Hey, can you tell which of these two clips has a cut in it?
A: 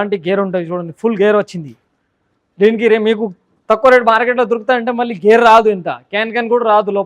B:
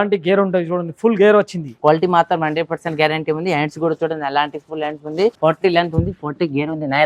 B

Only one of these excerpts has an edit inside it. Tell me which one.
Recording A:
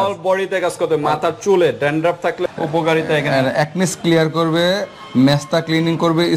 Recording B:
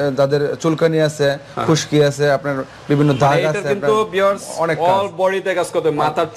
A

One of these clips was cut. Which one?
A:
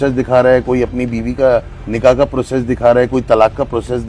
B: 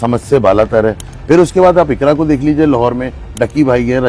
B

